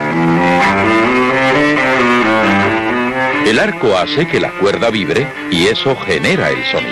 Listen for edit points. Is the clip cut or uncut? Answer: uncut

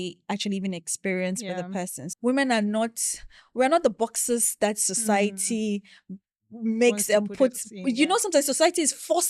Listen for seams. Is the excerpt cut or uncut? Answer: cut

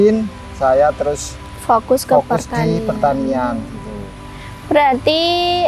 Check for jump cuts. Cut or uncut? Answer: uncut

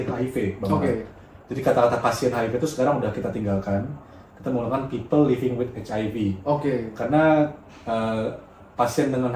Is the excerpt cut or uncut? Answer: uncut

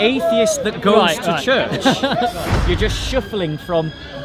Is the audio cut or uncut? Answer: cut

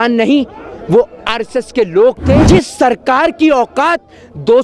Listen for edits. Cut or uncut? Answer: cut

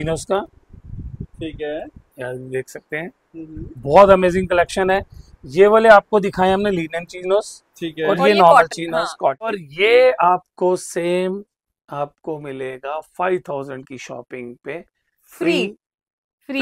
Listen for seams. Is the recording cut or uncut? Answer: cut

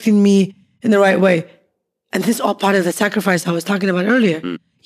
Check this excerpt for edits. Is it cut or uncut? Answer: uncut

